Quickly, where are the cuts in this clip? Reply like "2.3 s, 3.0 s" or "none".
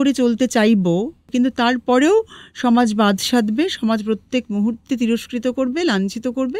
1.2 s